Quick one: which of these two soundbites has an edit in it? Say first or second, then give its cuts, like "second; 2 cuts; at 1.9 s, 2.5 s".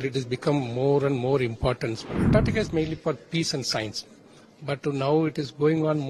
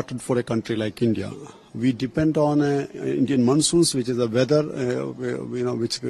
first; 1 cut; at 2.1 s